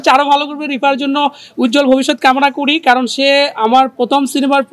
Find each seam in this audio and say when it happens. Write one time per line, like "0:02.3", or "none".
none